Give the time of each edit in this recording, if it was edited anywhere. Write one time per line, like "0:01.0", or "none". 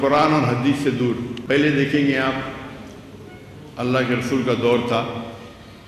0:01.3